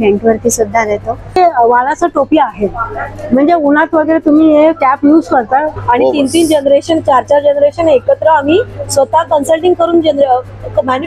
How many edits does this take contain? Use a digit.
2